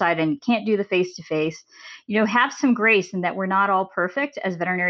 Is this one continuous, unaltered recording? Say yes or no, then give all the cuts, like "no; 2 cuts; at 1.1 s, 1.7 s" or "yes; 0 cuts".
yes; 0 cuts